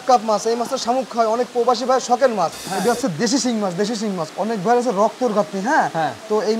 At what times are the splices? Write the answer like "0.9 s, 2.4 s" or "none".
2.7 s, 4.3 s